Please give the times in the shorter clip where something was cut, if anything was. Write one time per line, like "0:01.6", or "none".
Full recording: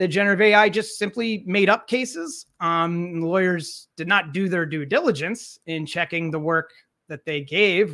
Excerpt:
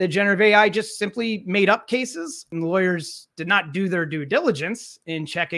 0:02.5